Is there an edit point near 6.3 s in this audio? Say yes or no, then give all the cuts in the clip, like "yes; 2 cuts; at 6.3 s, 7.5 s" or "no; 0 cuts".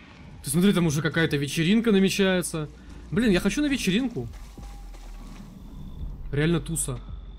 no; 0 cuts